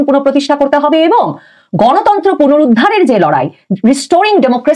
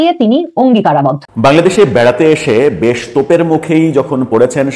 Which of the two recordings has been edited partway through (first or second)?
second